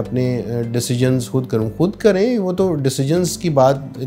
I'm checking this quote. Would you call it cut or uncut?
uncut